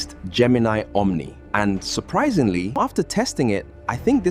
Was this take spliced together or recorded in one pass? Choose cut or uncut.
cut